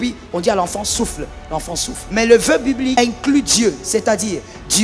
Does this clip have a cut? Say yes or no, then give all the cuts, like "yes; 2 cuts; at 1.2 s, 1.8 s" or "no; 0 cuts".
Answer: yes; 2 cuts; at 2.2 s, 3.0 s